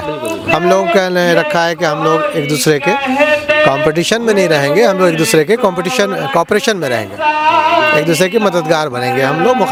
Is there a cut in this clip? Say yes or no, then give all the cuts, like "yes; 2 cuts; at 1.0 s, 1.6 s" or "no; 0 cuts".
no; 0 cuts